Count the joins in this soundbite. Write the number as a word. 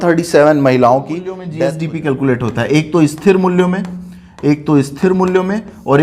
one